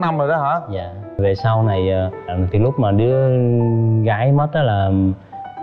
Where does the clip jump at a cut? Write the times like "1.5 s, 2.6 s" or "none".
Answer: 1.2 s